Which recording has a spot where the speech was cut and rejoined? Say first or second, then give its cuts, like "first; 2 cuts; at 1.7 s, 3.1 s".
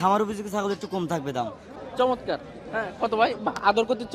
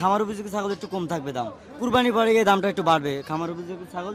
first; 1 cut; at 1.6 s